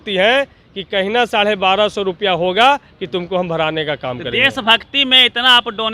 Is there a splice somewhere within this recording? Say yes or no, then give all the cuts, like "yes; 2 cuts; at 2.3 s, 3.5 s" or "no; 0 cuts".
no; 0 cuts